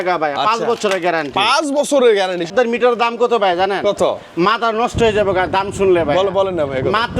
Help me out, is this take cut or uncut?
cut